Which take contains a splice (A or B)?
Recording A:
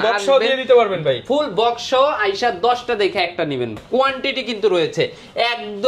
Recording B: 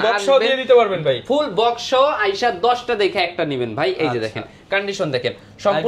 A